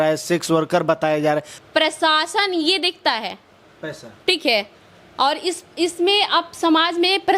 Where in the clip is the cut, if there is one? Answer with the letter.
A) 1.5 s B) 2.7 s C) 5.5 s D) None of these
A